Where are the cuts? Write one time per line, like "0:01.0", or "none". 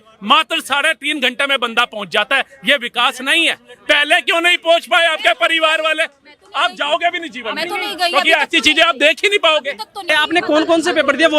0:10.1